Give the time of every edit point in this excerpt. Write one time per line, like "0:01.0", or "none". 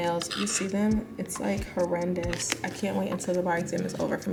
none